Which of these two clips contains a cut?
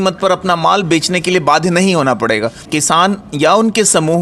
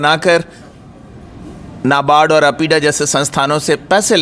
first; 1 cut; at 2.6 s

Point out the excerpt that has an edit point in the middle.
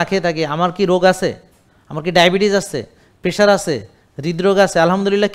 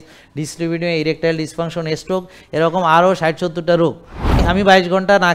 second; 1 cut; at 4.4 s

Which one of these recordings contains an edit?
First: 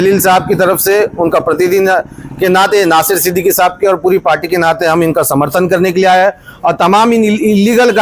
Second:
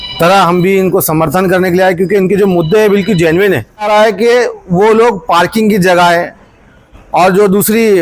second; 1 cut; at 3.9 s

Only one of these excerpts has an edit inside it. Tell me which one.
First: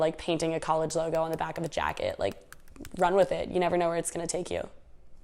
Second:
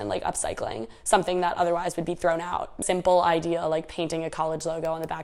second; 1 cut; at 2.8 s

